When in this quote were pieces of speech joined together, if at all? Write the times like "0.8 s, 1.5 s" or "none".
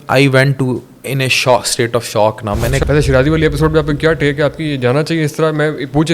2.8 s